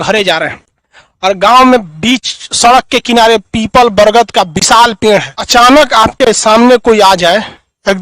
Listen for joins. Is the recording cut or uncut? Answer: cut